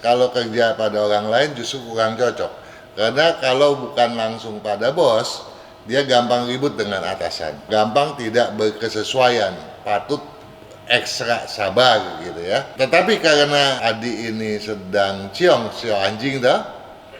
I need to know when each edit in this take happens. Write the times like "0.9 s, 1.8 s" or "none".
7.7 s, 12.7 s, 13.8 s